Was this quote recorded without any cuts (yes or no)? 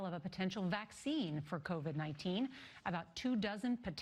yes